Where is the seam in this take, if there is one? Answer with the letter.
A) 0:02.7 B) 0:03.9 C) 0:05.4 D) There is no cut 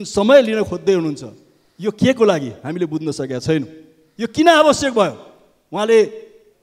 D